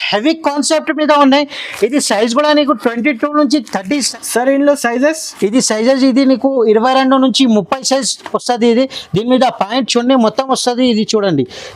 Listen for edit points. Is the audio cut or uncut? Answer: cut